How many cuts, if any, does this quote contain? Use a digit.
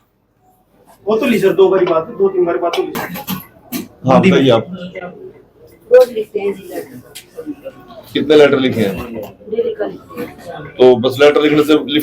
1